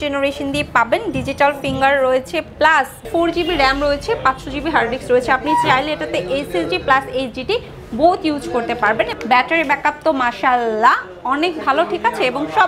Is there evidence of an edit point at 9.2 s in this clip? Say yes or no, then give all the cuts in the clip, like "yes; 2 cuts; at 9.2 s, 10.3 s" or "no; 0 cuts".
yes; 2 cuts; at 3.0 s, 9.2 s